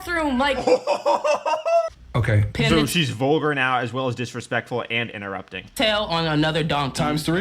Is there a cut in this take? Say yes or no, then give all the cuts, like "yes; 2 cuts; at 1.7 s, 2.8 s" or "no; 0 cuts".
yes; 1 cut; at 1.9 s